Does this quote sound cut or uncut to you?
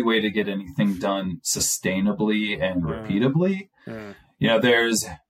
uncut